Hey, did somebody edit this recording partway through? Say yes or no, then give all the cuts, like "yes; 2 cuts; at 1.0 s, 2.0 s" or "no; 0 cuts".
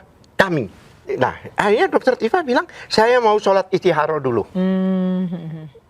yes; 1 cut; at 1.0 s